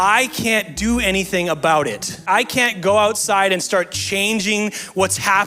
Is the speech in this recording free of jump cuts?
no; 1 cut; at 2.2 s

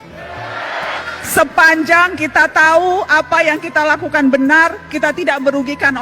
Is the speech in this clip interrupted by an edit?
yes; 1 cut; at 1.0 s

